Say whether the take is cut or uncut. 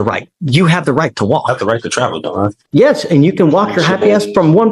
cut